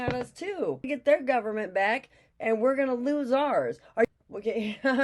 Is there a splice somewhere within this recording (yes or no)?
yes